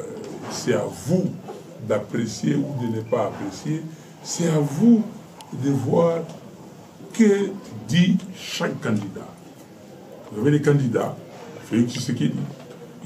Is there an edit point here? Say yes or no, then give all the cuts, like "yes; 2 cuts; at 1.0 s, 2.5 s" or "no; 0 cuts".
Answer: no; 0 cuts